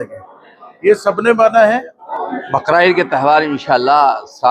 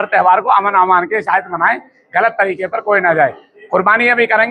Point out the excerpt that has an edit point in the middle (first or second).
first